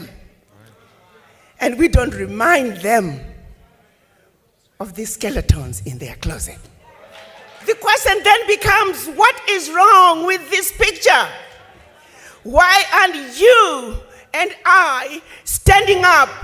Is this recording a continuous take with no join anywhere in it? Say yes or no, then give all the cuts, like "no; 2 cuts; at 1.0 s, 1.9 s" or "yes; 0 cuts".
no; 1 cut; at 7.6 s